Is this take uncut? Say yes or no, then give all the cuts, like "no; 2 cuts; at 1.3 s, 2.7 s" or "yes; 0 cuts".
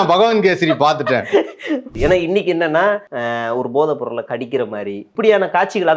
no; 3 cuts; at 1.9 s, 3.1 s, 5.1 s